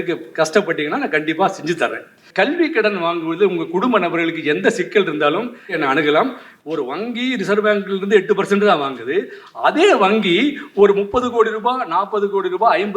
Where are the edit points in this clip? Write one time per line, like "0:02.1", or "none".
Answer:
0:02.2
0:05.8
0:06.5